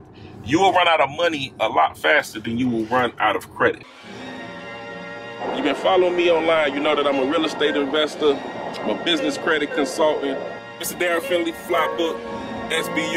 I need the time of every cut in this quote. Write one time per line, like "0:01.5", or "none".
0:03.9

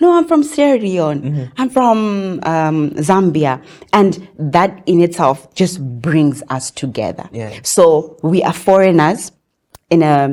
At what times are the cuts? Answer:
none

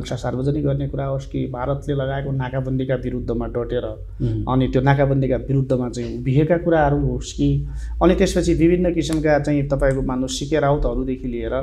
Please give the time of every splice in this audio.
none

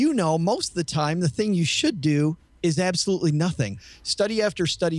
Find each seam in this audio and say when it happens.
0:03.8

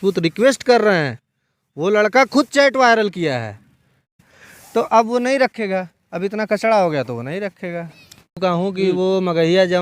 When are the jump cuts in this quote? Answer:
0:04.3
0:08.3

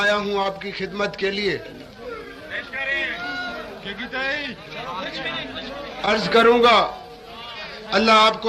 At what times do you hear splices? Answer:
none

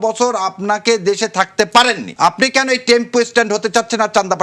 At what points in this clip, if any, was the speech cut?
0:02.1

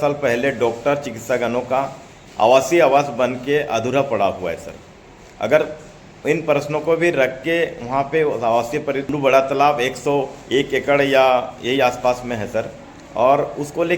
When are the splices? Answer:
0:09.1

